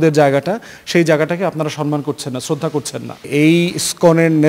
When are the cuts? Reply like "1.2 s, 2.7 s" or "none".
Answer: 3.3 s